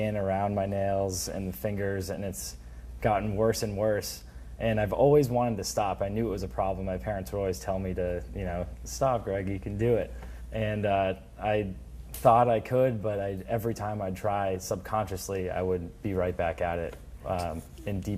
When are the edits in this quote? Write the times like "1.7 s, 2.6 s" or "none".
15.5 s